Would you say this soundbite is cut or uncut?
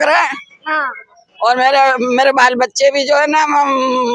uncut